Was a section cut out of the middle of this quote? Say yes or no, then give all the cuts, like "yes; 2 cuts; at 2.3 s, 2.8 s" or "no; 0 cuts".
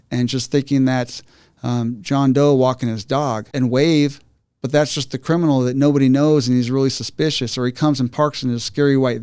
yes; 1 cut; at 3.5 s